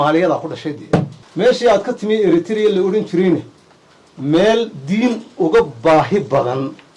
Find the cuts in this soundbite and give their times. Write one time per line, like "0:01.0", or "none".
0:01.2